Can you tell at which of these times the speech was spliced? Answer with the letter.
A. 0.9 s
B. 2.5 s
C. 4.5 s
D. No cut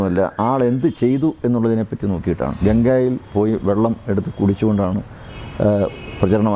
B